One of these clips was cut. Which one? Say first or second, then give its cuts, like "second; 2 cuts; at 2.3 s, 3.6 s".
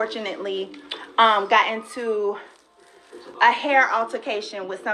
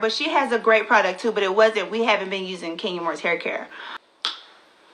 second; 1 cut; at 4.0 s